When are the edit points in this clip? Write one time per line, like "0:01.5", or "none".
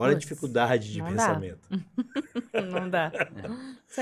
none